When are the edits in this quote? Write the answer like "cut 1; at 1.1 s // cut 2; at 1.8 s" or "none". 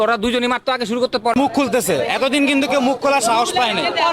cut 1; at 1.3 s